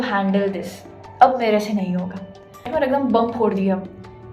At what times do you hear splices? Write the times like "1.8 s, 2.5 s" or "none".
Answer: 2.7 s